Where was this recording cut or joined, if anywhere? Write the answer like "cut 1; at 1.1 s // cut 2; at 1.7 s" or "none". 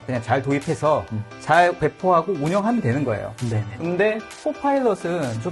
cut 1; at 1.8 s